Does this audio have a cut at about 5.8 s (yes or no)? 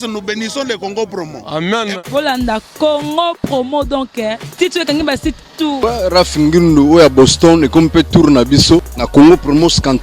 yes